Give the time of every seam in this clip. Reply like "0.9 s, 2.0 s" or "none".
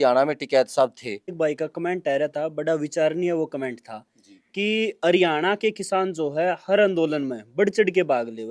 1.3 s